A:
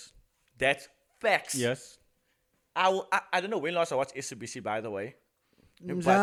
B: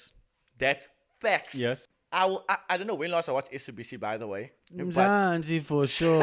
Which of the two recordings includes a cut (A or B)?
B